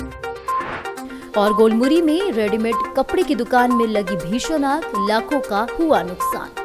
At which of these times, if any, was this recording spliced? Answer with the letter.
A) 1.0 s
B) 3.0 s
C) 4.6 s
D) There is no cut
A